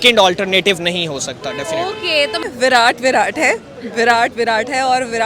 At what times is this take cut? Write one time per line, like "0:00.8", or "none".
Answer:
0:02.4